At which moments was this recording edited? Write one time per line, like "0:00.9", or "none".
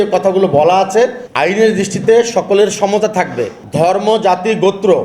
0:01.2
0:03.6